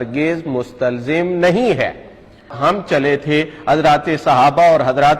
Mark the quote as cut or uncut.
cut